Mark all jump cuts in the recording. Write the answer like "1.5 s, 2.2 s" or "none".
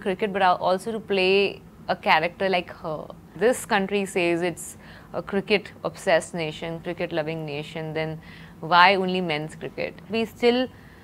3.3 s, 10.1 s